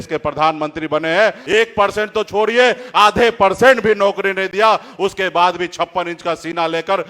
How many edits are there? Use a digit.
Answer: 1